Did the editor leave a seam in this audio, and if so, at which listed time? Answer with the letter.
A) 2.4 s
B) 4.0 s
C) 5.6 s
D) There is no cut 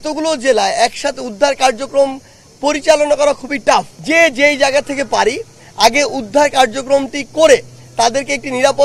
B